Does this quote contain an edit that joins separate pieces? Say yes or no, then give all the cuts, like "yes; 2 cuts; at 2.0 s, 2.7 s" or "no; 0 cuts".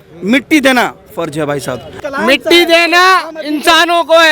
yes; 1 cut; at 1.9 s